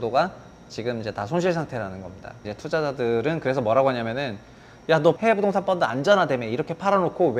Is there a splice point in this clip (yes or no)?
yes